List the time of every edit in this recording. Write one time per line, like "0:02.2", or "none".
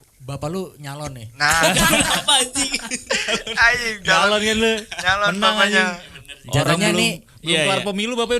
none

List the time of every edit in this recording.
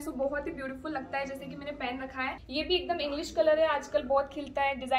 0:02.4

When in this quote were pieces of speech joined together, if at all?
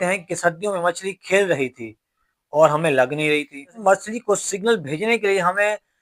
0:03.8

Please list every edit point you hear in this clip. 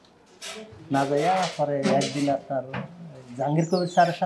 none

